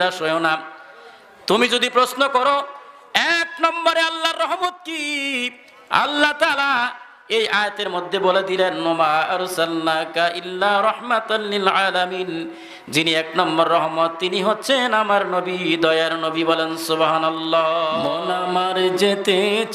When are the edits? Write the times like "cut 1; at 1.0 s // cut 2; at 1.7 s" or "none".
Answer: cut 1; at 18.3 s